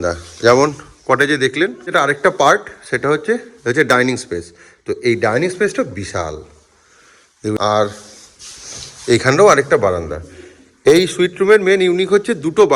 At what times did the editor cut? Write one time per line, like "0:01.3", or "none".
0:01.9
0:07.6